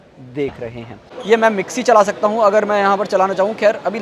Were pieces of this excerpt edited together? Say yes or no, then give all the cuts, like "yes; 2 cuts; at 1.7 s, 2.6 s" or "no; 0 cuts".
yes; 1 cut; at 1.1 s